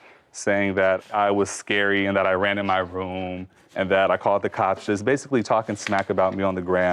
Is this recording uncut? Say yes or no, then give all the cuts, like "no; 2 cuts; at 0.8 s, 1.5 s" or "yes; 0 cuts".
yes; 0 cuts